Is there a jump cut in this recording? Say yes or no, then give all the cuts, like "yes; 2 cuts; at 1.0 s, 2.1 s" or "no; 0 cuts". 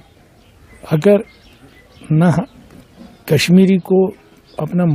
no; 0 cuts